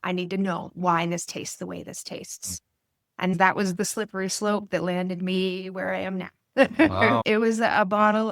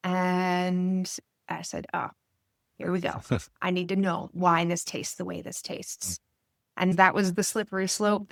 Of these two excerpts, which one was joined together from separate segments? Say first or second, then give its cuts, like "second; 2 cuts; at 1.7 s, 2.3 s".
first; 1 cut; at 7.2 s